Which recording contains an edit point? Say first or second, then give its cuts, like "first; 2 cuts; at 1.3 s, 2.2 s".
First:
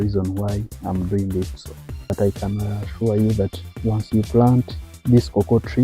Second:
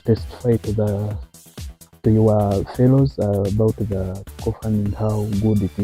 first; 1 cut; at 2.1 s